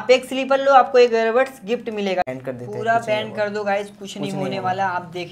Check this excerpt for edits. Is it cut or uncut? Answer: cut